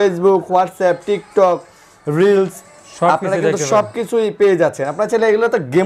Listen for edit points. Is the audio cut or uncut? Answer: uncut